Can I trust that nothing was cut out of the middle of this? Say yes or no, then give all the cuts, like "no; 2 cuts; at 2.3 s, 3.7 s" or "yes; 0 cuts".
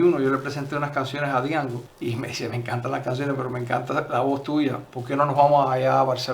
no; 1 cut; at 1.9 s